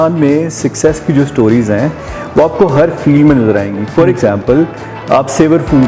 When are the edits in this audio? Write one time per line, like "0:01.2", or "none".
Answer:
none